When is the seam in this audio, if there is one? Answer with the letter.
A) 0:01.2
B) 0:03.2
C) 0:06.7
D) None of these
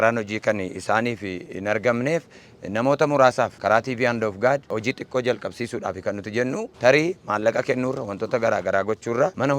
C